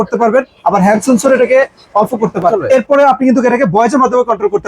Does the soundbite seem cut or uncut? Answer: cut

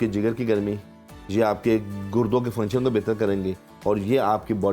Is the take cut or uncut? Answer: uncut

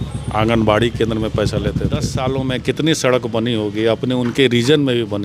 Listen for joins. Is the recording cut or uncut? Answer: cut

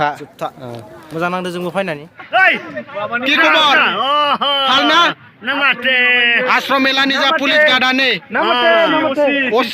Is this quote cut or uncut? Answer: cut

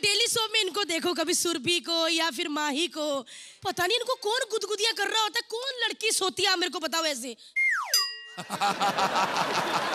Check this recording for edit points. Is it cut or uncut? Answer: uncut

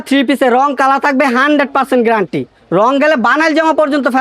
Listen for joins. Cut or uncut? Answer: uncut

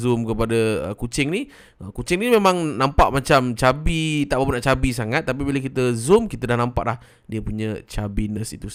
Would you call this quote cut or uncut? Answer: uncut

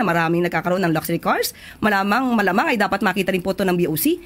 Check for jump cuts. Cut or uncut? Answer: uncut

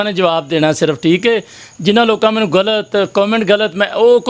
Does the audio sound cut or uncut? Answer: uncut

